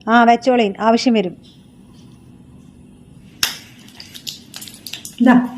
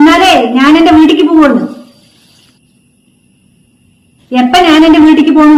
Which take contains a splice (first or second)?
first